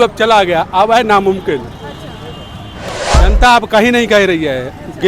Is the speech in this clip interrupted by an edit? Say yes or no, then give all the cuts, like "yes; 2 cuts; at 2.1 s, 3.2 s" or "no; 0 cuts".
yes; 1 cut; at 3.0 s